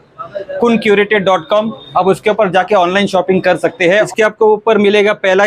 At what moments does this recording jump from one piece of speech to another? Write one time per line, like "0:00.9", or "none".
0:04.1